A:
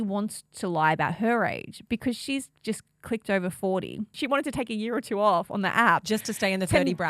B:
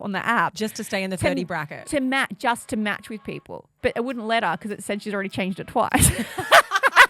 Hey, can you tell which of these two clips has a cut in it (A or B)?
A